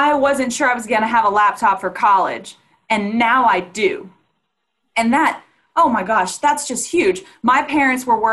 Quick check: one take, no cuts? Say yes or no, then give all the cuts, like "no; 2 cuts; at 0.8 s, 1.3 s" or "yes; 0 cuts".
yes; 0 cuts